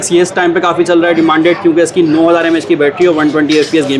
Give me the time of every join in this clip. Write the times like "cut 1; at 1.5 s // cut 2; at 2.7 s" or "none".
none